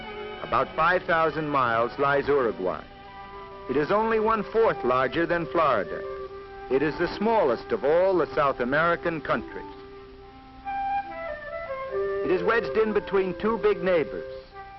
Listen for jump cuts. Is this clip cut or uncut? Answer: cut